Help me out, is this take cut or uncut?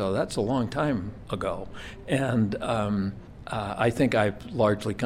uncut